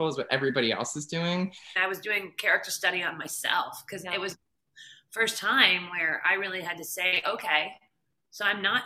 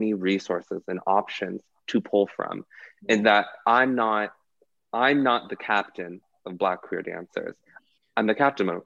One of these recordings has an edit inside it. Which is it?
first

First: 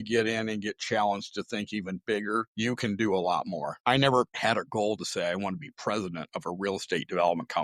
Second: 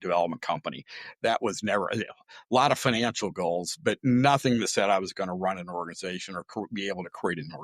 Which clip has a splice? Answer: first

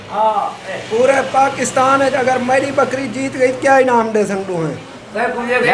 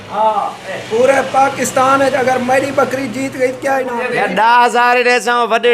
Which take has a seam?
second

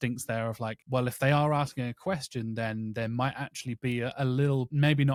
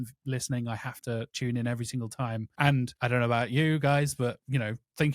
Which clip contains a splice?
second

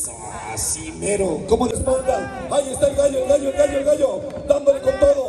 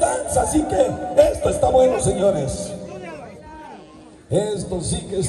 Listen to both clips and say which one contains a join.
first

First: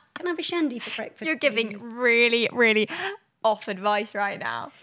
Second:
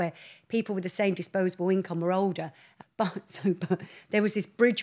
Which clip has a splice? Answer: second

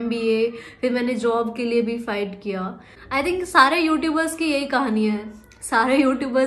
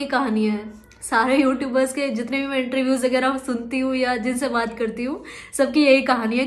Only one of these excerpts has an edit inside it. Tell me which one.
first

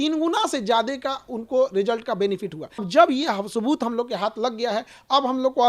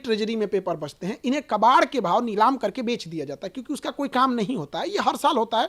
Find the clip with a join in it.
first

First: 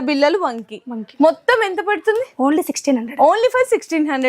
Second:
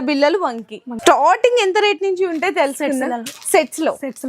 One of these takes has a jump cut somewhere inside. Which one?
second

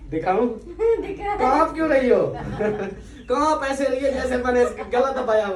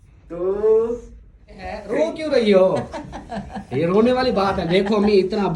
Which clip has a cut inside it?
second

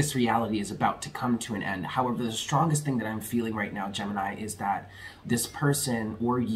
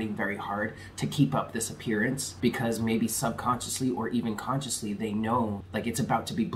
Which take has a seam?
second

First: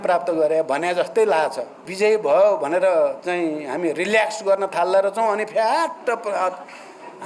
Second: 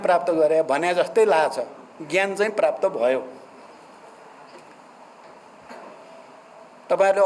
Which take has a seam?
first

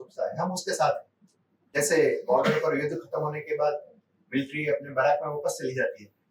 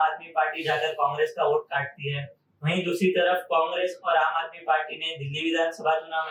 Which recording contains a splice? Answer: first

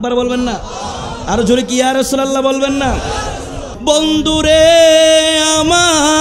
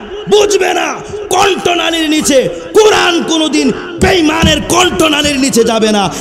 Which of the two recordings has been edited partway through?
first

